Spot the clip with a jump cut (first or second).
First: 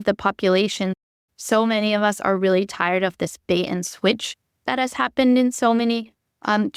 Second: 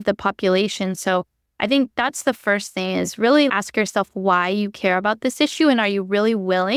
first